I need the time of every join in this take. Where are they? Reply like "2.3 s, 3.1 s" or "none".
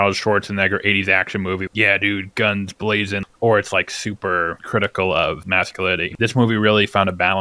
1.7 s, 3.2 s, 4.6 s, 5.8 s